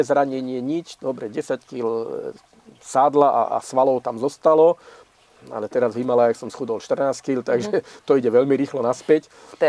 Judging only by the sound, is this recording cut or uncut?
uncut